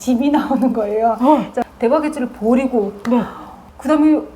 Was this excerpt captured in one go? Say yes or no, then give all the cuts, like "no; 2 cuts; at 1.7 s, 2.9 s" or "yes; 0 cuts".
no; 1 cut; at 1.6 s